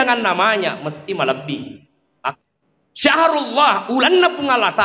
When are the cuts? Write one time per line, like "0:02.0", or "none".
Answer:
0:02.3